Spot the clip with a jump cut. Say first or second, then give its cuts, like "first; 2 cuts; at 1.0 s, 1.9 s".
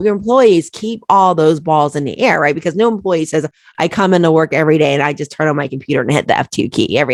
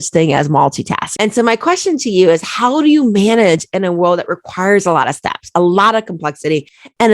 second; 1 cut; at 1.1 s